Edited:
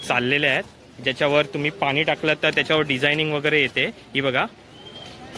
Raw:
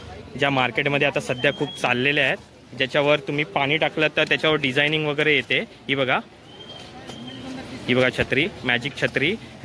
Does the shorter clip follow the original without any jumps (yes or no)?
yes